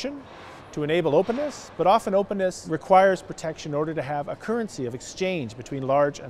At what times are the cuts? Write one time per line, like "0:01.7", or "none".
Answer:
0:02.7

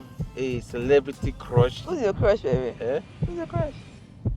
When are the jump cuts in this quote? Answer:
0:01.8

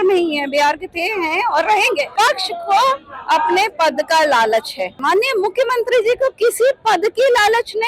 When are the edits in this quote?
0:02.1
0:05.0

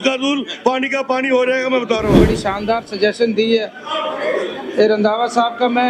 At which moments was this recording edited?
0:02.3

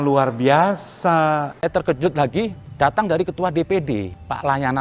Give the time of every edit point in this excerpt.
0:01.5

